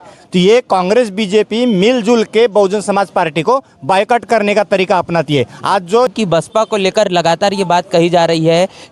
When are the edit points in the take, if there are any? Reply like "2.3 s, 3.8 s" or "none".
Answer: 6.1 s